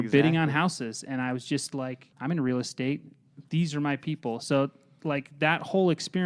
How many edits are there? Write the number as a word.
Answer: one